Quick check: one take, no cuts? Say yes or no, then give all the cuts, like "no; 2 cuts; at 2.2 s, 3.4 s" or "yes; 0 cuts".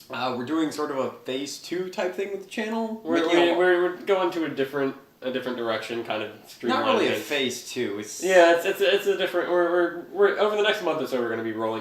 no; 1 cut; at 4.0 s